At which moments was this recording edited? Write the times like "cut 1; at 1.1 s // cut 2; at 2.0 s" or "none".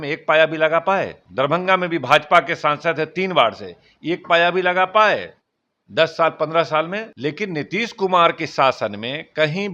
cut 1; at 1.2 s // cut 2; at 7.0 s